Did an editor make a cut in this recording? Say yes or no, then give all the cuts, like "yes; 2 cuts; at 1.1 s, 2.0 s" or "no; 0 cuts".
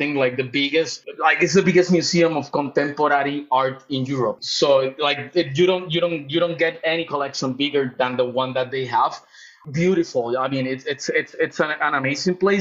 yes; 3 cuts; at 1.0 s, 4.4 s, 9.5 s